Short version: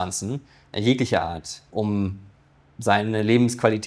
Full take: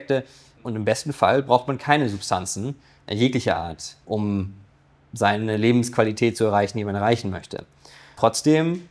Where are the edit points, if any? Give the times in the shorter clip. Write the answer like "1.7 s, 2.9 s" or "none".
none